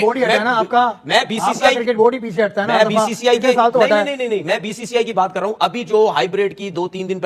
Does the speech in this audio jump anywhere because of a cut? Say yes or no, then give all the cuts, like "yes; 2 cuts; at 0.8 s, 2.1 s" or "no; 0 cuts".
no; 0 cuts